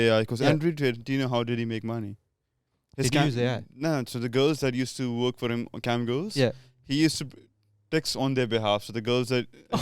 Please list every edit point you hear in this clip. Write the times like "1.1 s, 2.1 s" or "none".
none